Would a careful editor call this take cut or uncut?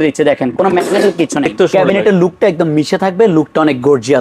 cut